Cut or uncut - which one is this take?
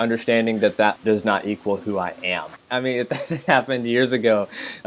cut